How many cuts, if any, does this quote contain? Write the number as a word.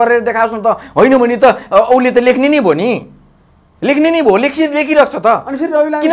zero